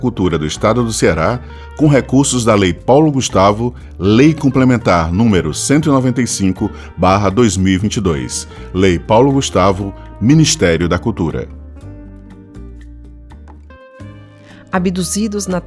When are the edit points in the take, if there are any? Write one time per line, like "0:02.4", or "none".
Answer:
0:13.6